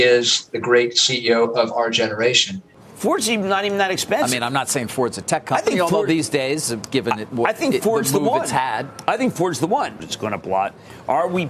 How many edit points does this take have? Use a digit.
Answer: 2